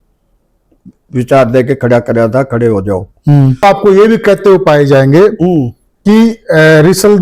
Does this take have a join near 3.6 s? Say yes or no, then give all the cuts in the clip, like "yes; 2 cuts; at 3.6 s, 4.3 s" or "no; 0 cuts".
yes; 1 cut; at 3.6 s